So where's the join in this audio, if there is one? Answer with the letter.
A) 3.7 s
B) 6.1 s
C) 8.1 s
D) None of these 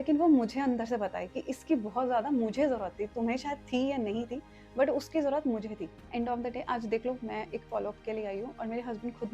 B